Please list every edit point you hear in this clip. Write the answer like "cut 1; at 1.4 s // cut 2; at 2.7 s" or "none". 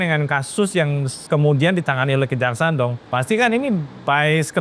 cut 1; at 1.1 s // cut 2; at 3.0 s